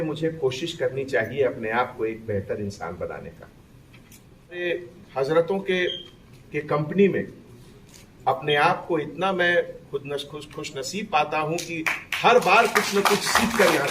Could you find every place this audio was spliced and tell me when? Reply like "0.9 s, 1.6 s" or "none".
4.6 s